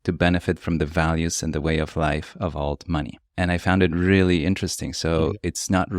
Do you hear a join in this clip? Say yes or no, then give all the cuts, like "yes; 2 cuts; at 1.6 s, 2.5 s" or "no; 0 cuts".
yes; 1 cut; at 3.2 s